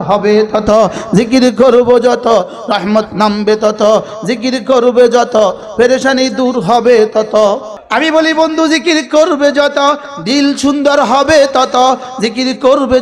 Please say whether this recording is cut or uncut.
cut